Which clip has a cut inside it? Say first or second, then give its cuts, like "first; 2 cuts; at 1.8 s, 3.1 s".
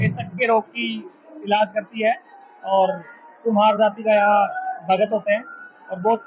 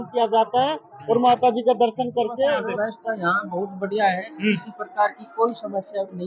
second; 1 cut; at 2.8 s